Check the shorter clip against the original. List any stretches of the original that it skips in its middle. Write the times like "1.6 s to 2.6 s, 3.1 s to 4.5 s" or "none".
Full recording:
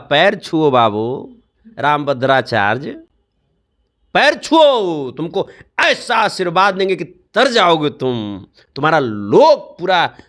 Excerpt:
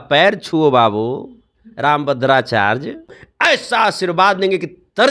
3.2 s to 5.6 s